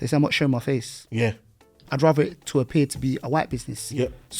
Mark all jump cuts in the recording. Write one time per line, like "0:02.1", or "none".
0:01.8